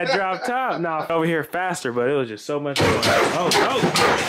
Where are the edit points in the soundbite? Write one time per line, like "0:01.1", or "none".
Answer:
0:01.1